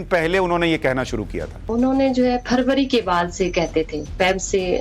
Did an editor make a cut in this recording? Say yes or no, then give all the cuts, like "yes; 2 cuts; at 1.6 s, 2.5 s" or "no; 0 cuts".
yes; 1 cut; at 1.6 s